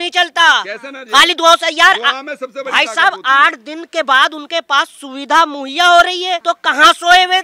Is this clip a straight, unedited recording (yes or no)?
no